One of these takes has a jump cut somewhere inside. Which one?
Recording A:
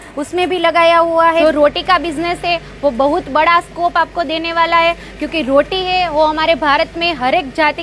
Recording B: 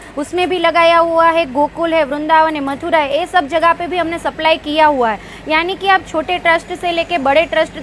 A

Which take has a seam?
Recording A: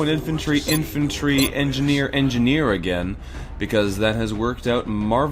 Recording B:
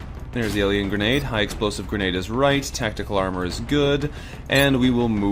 A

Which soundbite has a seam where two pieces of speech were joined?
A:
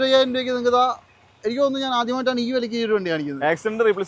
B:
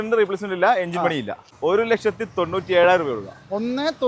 B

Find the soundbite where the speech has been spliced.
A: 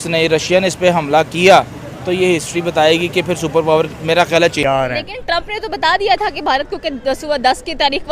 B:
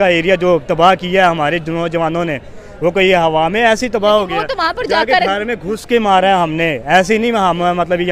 A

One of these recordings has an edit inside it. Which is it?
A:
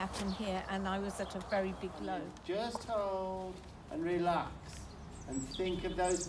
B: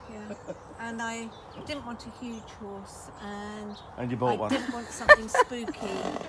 A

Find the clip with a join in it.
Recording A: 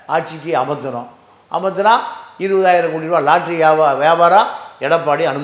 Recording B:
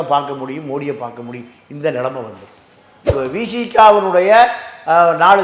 B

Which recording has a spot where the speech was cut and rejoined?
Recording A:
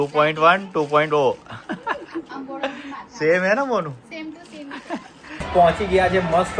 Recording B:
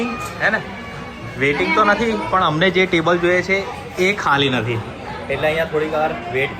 A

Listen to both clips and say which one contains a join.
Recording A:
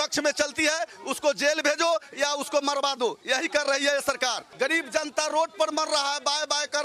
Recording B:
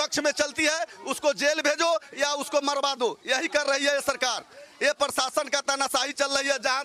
A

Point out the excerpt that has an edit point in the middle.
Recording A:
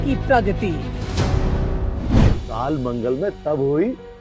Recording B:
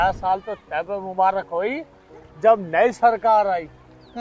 A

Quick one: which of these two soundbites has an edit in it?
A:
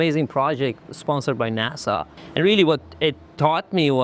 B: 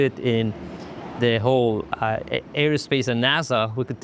A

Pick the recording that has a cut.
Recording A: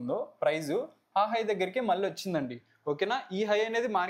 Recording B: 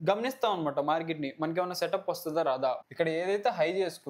B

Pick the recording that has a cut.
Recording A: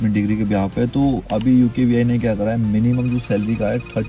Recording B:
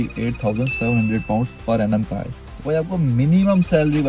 B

